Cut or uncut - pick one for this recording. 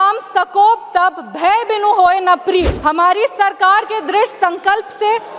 cut